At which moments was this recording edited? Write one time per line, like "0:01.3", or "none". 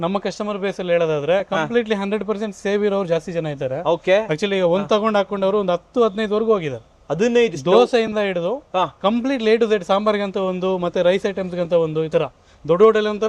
none

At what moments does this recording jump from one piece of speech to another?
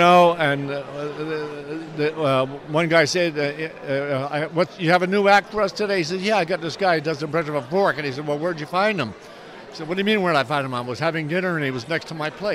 none

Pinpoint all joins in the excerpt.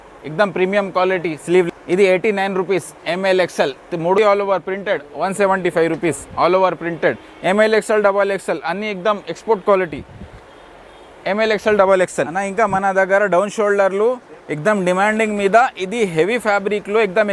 0:01.7
0:04.2
0:12.4

